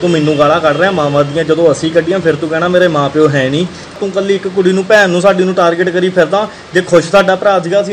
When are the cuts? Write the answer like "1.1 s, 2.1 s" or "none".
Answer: 4.0 s